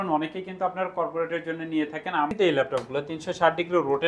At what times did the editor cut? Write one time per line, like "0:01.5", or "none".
0:02.3